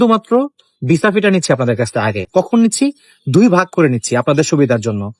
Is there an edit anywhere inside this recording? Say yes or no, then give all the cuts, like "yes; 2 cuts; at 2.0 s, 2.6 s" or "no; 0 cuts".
no; 0 cuts